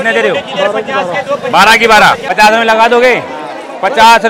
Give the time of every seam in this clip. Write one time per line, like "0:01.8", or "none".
0:02.3